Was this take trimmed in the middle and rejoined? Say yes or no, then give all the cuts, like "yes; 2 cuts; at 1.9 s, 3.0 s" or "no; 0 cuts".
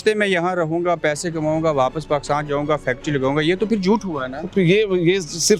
no; 0 cuts